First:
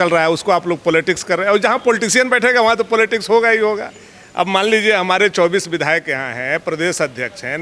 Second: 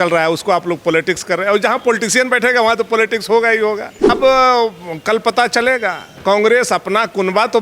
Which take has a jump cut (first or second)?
second